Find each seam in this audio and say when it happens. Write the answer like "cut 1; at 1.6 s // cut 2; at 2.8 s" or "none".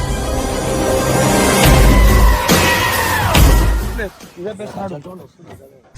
cut 1; at 3.9 s